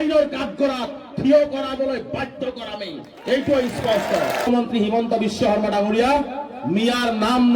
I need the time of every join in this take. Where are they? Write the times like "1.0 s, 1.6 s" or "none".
4.5 s